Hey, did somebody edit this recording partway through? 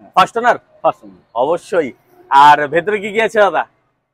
no; 0 cuts

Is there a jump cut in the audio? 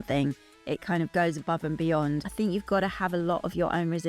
yes; 1 cut; at 2.3 s

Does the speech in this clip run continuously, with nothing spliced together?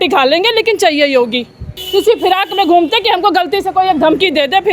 no; 1 cut; at 1.7 s

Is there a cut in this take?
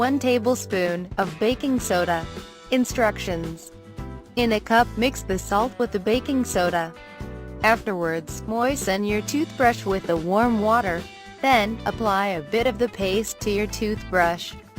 yes; 1 cut; at 10.9 s

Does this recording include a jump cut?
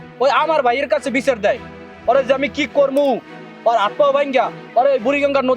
no; 0 cuts

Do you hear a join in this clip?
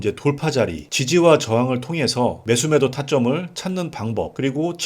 yes; 2 cuts; at 0.9 s, 2.4 s

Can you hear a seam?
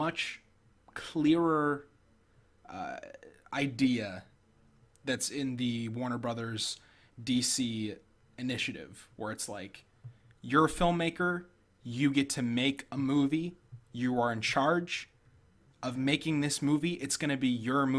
yes; 1 cut; at 4.1 s

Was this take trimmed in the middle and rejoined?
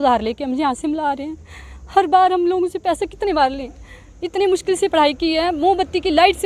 no; 0 cuts

